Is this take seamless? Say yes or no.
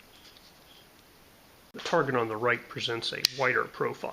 no